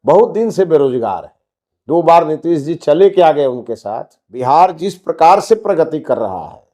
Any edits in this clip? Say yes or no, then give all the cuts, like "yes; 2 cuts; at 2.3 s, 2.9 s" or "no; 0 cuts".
yes; 1 cut; at 4.4 s